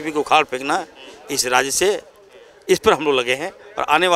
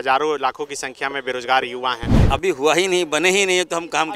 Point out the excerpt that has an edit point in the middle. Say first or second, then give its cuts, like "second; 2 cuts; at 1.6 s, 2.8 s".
second; 1 cut; at 2.1 s